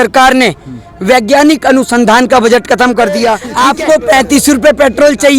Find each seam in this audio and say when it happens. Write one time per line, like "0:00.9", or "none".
0:03.5